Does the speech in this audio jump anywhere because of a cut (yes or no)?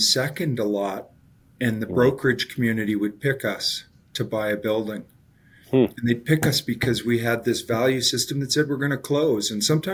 no